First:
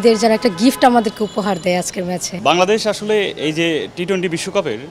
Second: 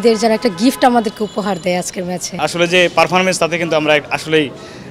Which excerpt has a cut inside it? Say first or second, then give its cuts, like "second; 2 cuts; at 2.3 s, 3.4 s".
second; 1 cut; at 2.3 s